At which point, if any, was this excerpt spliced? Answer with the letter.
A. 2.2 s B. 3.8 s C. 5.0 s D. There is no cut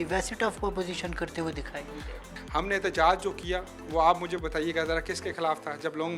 A